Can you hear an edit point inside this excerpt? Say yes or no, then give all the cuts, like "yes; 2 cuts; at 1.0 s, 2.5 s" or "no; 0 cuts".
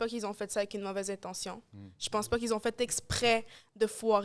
no; 0 cuts